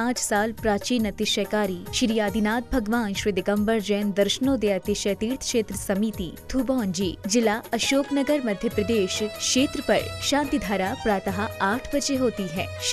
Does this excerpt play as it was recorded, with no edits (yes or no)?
yes